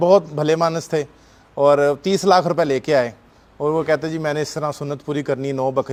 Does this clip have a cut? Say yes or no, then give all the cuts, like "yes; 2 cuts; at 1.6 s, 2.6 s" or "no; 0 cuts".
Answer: no; 0 cuts